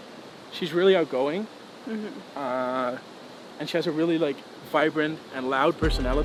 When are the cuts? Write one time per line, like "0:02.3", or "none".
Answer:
none